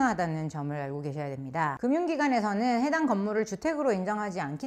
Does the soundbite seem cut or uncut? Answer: uncut